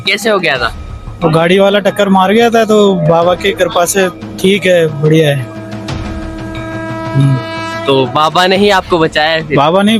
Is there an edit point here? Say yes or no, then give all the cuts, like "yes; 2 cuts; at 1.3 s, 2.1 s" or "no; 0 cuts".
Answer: no; 0 cuts